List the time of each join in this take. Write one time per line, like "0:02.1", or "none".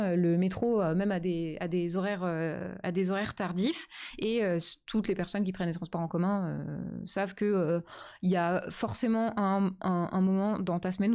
none